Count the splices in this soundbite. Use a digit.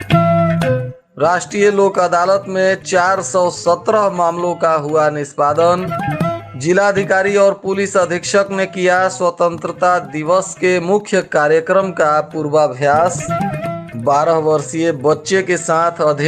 1